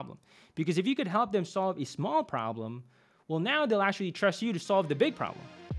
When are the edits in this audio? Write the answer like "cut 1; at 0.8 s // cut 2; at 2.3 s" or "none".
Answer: none